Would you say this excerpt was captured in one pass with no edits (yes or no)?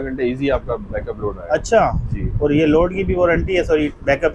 yes